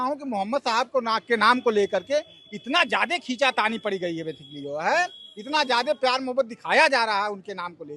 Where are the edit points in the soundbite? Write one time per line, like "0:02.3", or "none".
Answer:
none